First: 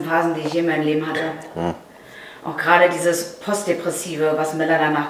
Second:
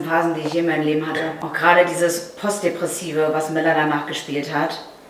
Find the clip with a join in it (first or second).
second